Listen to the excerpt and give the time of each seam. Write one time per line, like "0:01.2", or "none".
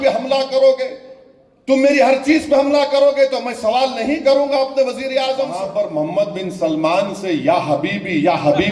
0:05.6